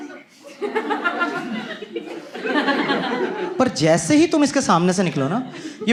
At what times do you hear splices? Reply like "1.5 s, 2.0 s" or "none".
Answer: none